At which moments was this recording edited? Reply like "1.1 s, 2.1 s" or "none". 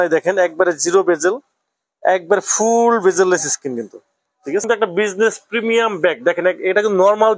4.6 s

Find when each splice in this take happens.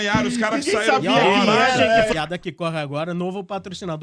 1.9 s

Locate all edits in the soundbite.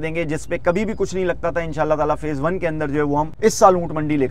3.3 s

